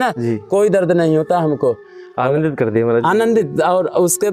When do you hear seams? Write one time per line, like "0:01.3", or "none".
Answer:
none

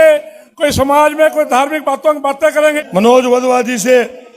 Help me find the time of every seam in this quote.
0:02.8

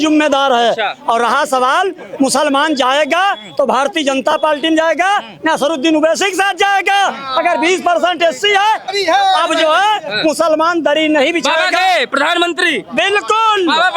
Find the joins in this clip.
0:08.9

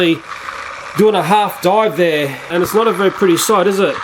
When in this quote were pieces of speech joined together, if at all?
0:02.5

